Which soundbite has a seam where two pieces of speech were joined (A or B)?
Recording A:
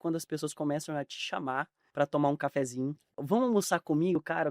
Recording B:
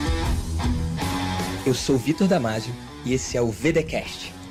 A